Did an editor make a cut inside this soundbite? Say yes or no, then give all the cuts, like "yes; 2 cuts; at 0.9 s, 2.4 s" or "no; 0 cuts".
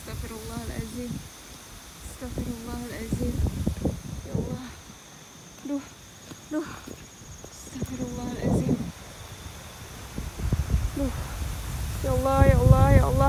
no; 0 cuts